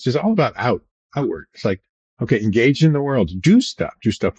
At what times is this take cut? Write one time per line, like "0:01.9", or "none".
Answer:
none